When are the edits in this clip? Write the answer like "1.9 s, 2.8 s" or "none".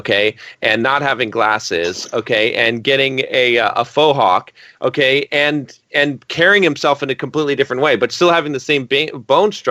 none